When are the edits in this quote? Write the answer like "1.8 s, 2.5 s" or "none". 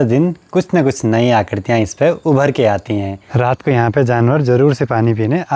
3.3 s

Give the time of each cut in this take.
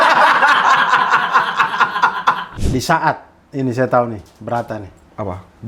2.5 s

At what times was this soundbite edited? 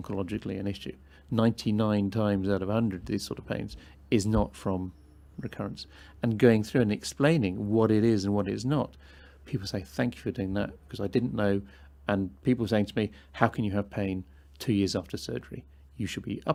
none

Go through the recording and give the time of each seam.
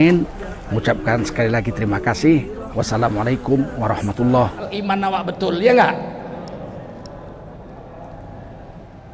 4.6 s

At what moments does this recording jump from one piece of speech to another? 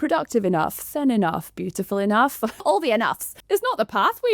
2.6 s, 3.3 s

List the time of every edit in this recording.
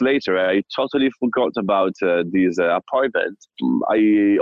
3.5 s

